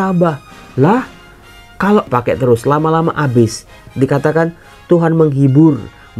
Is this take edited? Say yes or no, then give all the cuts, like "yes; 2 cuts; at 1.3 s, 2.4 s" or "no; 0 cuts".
yes; 2 cuts; at 2.1 s, 3.8 s